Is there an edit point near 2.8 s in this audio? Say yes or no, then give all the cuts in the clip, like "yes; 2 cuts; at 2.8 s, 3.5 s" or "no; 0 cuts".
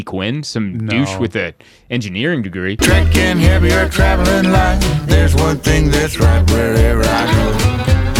yes; 1 cut; at 2.8 s